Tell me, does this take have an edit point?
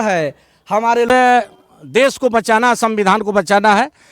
yes; 1 cut; at 1.1 s

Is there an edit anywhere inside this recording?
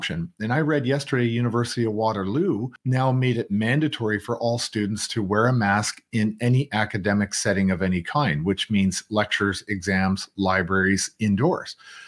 yes; 1 cut; at 2.8 s

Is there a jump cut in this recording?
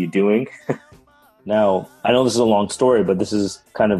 yes; 1 cut; at 1.1 s

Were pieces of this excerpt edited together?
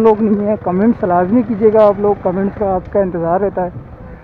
no; 0 cuts

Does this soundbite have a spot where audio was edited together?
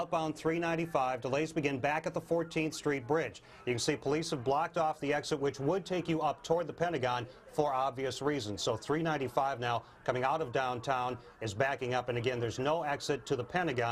no; 0 cuts

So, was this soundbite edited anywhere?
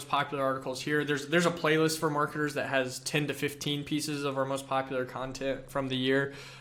no; 0 cuts

